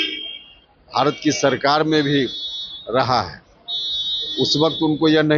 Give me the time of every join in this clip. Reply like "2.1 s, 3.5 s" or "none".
none